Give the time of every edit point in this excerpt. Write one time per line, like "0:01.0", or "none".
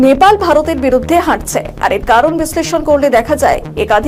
none